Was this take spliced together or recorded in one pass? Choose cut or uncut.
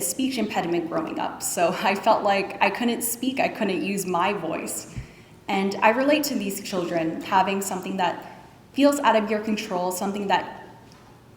uncut